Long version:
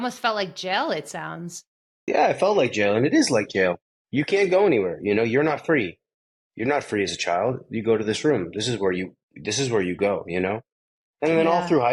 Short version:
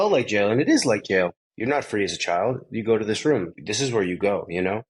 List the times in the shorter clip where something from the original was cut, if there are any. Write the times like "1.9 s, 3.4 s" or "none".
1.5 s, 3.5 s